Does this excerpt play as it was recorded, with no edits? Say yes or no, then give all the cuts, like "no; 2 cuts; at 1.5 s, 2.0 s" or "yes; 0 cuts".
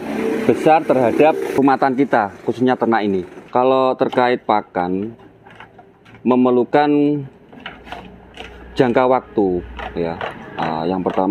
no; 2 cuts; at 1.6 s, 3.3 s